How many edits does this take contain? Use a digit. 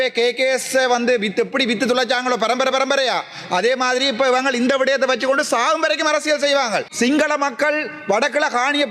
1